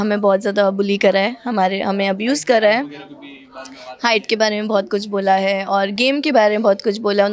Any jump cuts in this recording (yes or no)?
no